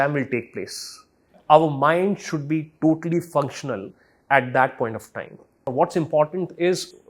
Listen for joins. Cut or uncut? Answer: cut